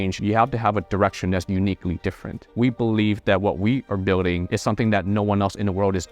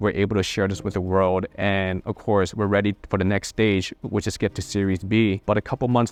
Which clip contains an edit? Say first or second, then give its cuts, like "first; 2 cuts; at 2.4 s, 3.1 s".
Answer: first; 1 cut; at 2.4 s